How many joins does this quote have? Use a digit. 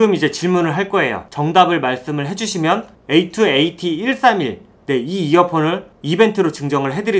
1